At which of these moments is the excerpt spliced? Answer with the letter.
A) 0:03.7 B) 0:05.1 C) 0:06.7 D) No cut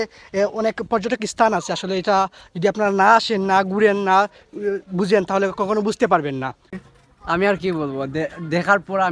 C